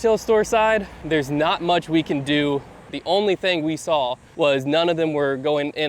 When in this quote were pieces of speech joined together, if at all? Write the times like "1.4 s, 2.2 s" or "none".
0.9 s, 2.9 s, 4.2 s